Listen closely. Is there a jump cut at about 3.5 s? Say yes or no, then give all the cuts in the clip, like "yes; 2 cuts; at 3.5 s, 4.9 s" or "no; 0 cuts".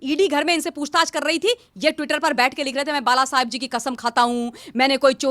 no; 0 cuts